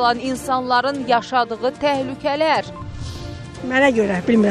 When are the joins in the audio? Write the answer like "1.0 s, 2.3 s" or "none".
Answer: 3.3 s